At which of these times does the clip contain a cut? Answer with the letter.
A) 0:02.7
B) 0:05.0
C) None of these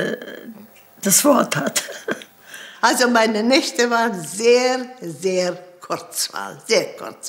A